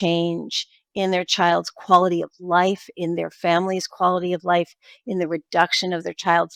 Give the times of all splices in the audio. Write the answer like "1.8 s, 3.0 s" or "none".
none